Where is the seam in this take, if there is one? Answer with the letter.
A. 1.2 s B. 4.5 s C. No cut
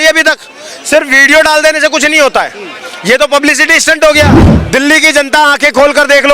B